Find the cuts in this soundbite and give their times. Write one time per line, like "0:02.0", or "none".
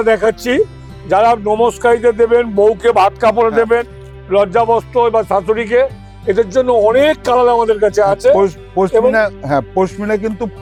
none